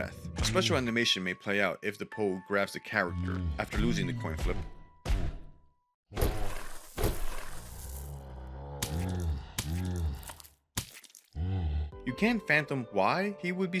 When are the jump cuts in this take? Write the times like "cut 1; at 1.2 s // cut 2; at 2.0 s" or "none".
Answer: cut 1; at 11.8 s